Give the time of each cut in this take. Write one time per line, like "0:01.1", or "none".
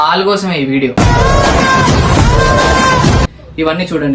0:03.2